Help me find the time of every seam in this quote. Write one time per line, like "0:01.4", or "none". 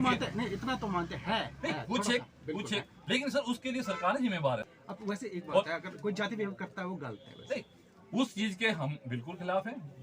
0:04.7